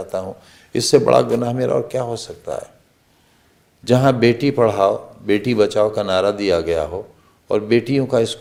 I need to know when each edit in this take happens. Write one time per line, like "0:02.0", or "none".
none